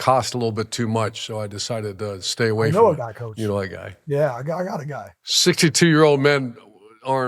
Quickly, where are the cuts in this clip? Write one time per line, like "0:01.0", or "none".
0:05.3